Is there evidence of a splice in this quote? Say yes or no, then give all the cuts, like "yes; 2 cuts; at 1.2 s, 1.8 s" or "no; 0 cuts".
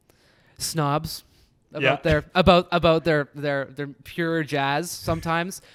no; 0 cuts